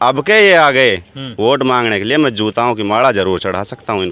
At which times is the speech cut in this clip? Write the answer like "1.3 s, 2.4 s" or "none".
none